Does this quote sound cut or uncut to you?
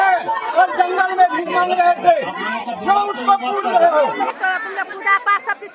cut